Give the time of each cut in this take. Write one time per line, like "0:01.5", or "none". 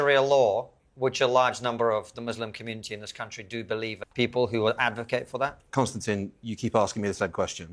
0:04.0

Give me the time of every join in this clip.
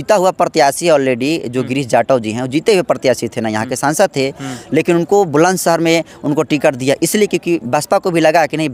none

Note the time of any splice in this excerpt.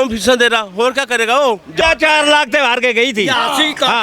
0:01.8

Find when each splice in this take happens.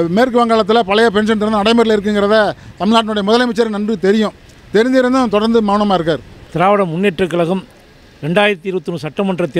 none

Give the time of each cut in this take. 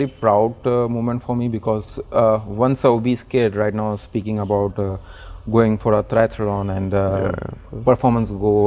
none

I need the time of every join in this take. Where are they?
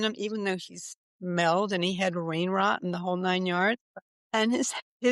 0:03.8

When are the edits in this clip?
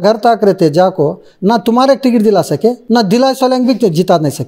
none

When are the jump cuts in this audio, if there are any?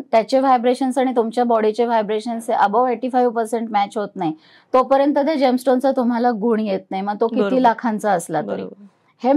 none

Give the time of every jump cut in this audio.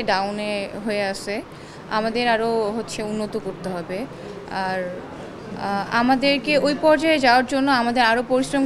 none

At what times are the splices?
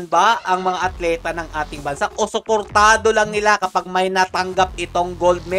none

